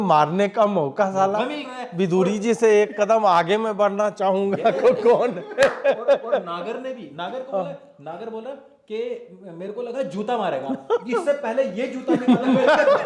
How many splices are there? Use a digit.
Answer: 0